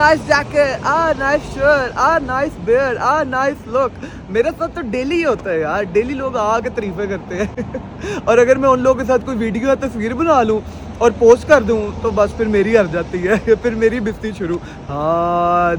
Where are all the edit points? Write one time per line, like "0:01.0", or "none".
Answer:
none